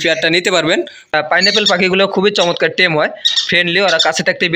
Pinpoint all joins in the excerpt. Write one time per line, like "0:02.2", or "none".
0:01.1